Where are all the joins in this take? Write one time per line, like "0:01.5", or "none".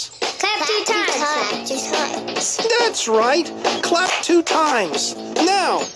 0:04.8

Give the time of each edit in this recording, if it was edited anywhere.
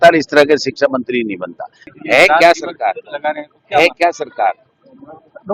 0:01.8

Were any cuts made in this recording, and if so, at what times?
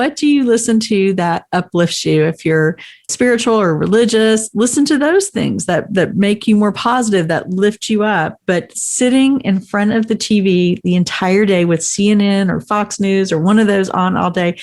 0:03.1

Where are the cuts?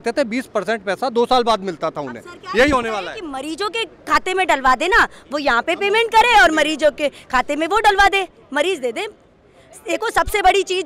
none

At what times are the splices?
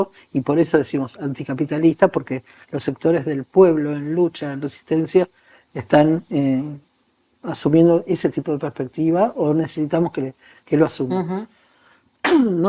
none

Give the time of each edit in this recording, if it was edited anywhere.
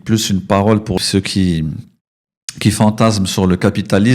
0:01.0

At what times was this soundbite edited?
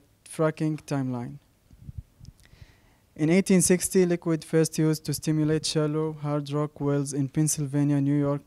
none

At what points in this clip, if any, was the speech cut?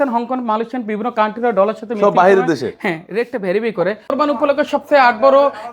0:04.1

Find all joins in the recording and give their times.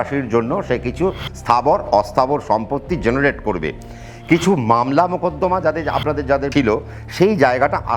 0:06.5

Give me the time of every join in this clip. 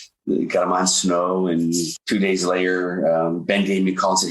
0:01.9

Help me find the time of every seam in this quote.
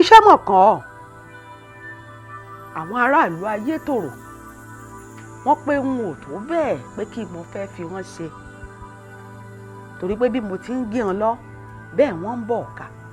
0:08.3
0:10.0

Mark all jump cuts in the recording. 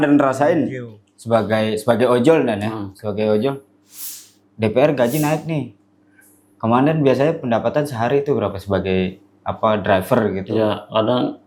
none

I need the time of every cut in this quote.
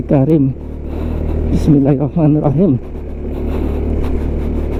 none

